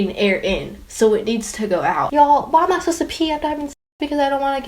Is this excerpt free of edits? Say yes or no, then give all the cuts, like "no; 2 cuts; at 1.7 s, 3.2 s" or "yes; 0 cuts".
no; 1 cut; at 2.1 s